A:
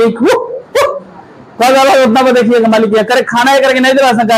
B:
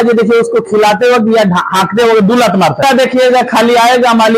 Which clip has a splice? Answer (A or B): B